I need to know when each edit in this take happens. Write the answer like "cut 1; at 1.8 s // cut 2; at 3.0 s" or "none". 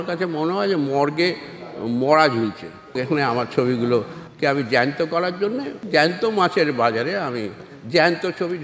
cut 1; at 3.0 s // cut 2; at 5.8 s